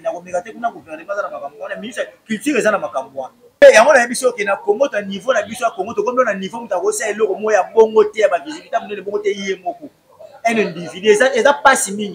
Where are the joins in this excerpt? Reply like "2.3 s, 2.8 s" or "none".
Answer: 3.6 s